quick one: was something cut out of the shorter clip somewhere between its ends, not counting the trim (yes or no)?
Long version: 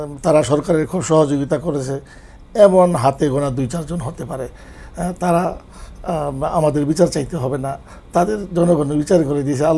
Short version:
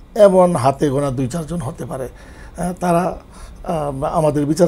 no